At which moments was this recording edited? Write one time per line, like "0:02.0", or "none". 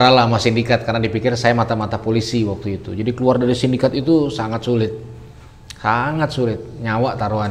none